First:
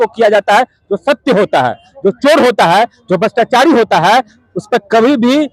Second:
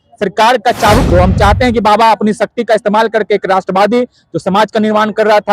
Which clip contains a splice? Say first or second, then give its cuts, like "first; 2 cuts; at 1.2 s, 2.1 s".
second; 1 cut; at 1.0 s